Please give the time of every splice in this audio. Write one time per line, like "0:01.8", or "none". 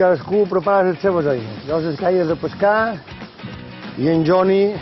0:01.5